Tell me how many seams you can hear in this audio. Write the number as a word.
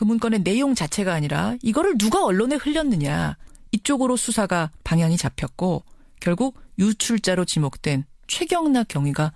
one